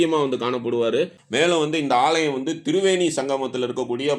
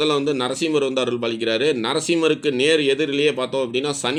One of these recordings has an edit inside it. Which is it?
first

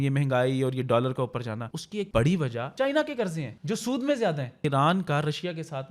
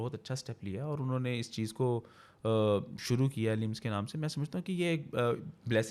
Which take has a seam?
first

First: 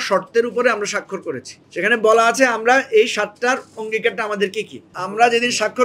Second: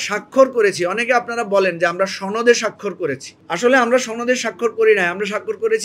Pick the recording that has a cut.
first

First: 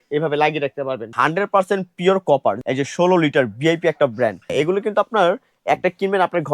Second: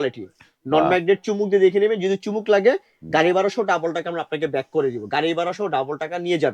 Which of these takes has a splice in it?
first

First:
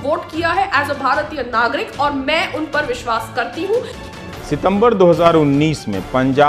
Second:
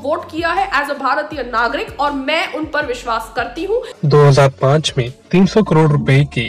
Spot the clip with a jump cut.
first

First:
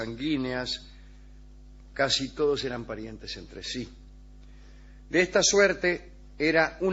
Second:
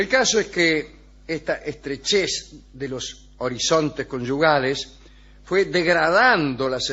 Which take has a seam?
first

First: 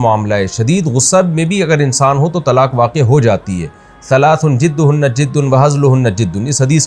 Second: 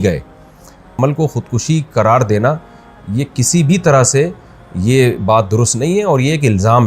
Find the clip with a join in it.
second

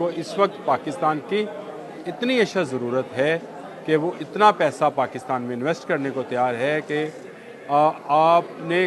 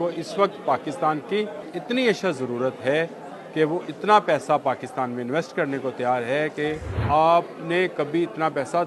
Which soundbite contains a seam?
second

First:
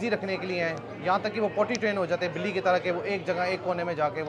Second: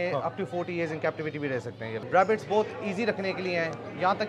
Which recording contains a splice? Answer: second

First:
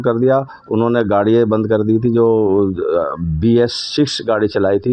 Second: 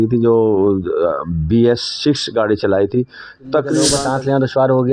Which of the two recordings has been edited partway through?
second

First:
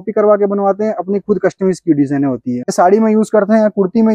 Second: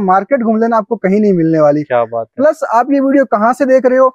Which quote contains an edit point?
first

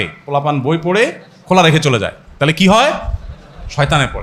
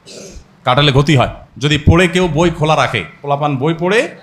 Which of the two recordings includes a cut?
second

